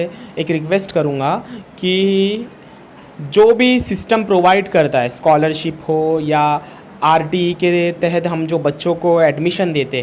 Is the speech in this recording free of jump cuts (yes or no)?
yes